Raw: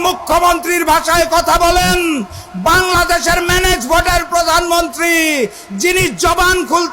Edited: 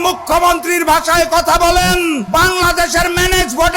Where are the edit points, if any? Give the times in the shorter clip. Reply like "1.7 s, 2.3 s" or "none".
2.2 s